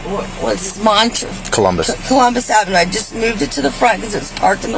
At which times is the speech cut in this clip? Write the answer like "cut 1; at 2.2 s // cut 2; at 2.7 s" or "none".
none